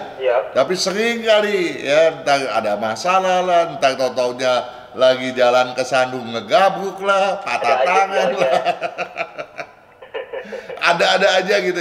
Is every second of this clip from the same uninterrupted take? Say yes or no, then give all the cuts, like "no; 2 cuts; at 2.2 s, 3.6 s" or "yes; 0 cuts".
yes; 0 cuts